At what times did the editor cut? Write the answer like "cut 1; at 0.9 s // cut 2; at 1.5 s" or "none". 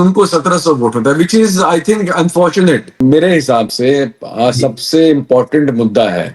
cut 1; at 3.0 s